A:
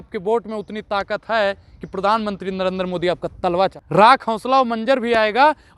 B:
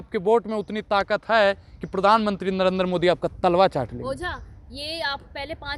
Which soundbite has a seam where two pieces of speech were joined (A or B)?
A